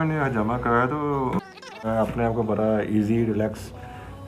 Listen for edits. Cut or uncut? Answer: cut